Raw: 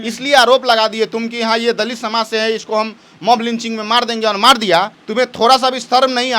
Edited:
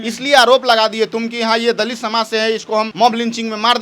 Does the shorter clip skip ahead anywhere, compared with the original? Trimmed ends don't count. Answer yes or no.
yes